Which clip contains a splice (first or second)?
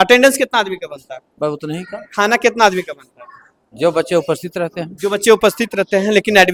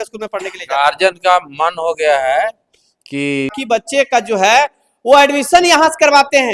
second